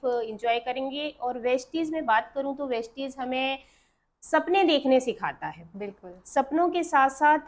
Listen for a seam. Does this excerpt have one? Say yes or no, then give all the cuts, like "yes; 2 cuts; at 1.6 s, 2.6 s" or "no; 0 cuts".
no; 0 cuts